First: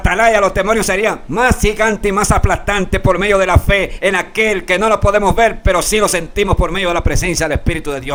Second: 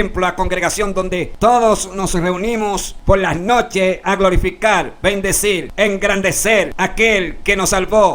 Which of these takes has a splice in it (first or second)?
second